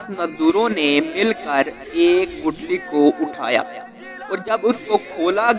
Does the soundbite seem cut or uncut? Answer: uncut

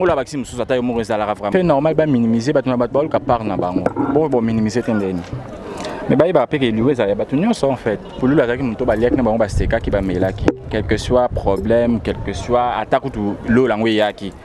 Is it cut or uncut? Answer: cut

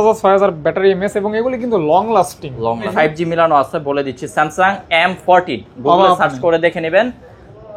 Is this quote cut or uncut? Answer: cut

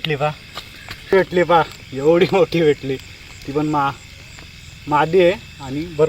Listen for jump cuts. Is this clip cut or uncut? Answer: cut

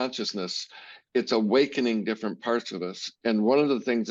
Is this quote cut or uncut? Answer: uncut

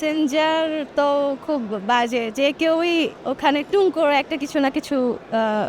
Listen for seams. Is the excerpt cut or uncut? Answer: uncut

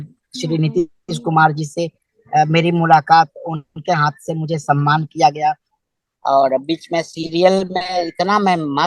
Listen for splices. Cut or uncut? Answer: cut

